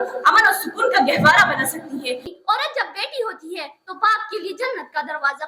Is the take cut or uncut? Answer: cut